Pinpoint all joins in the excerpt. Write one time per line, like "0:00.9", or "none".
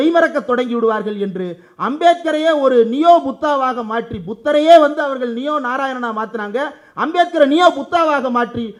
none